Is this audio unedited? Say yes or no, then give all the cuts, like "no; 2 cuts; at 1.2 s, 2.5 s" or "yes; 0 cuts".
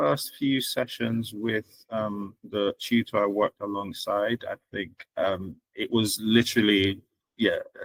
yes; 0 cuts